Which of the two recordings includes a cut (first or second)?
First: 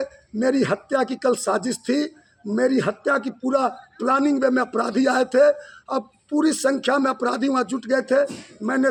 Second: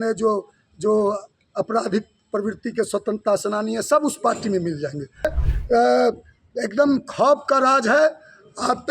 second